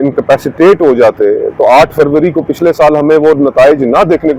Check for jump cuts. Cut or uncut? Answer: uncut